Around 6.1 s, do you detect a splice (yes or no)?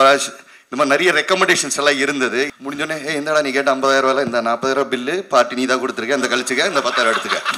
no